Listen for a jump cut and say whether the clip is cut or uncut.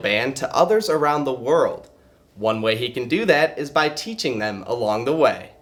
uncut